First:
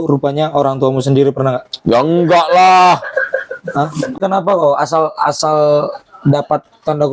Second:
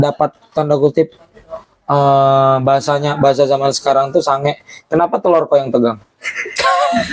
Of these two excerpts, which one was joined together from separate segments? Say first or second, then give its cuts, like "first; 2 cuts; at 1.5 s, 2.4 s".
first; 1 cut; at 4.2 s